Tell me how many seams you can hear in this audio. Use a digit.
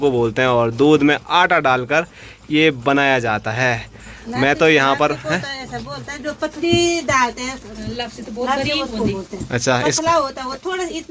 0